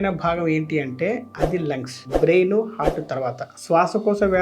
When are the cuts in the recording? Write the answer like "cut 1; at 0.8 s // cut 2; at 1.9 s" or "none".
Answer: none